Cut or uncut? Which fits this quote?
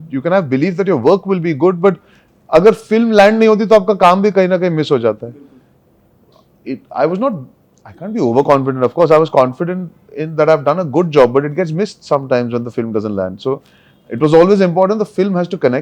uncut